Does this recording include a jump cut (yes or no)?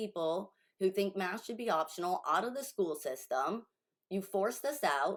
no